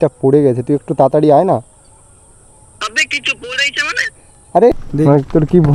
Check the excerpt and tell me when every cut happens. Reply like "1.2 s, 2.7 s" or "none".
4.7 s